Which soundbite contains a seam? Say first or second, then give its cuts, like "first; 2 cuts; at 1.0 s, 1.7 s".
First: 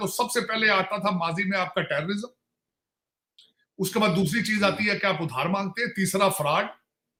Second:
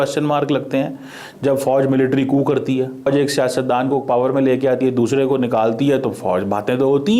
second; 1 cut; at 3.0 s